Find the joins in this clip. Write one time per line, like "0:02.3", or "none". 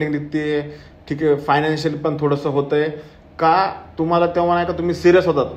none